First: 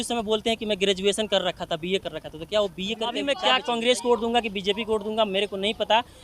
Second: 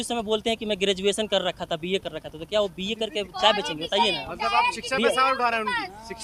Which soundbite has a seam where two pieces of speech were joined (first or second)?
first